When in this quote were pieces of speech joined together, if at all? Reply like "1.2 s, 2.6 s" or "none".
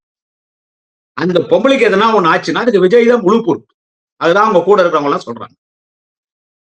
none